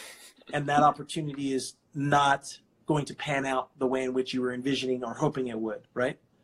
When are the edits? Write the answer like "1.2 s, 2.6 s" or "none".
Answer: none